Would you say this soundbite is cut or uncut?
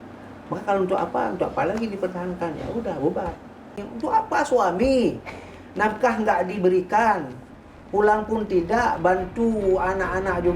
cut